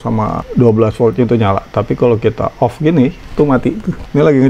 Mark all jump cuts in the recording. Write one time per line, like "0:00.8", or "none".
none